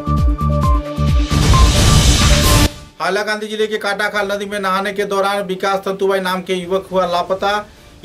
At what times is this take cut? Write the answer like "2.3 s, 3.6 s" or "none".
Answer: 2.8 s